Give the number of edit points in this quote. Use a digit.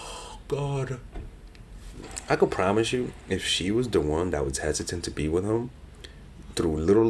1